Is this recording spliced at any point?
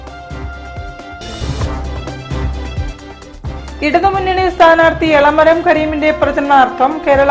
yes; 1 cut; at 3.3 s

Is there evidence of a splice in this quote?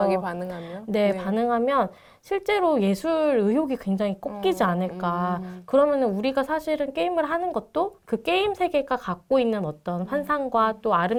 no; 0 cuts

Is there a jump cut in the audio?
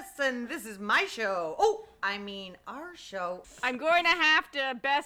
yes; 1 cut; at 3.5 s

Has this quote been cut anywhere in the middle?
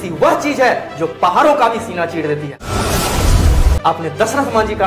yes; 2 cuts; at 2.7 s, 3.7 s

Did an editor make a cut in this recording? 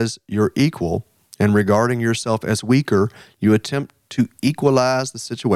no; 0 cuts

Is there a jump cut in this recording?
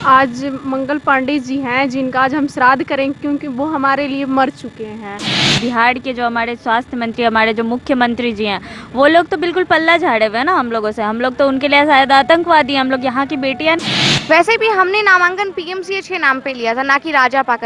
yes; 2 cuts; at 5.4 s, 13.8 s

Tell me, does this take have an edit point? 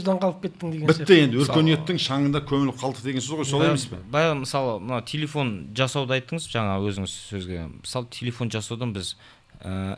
no; 0 cuts

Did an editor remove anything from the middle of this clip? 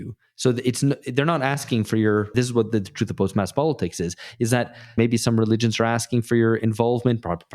yes; 2 cuts; at 2.3 s, 5.0 s

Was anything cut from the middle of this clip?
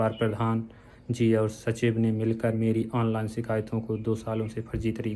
no; 0 cuts

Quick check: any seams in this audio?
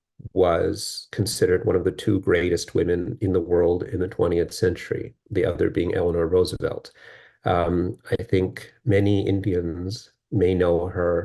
no; 0 cuts

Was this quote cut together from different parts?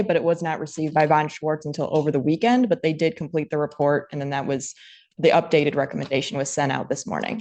no; 0 cuts

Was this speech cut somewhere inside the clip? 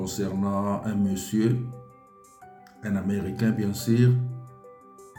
no; 0 cuts

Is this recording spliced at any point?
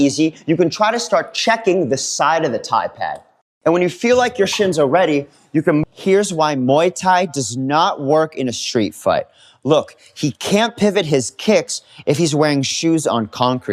no; 0 cuts

